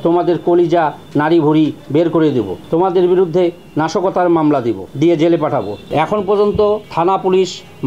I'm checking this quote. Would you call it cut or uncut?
cut